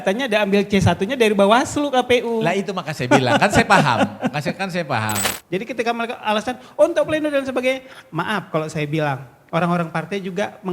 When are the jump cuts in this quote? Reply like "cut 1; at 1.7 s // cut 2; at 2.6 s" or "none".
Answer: cut 1; at 5.3 s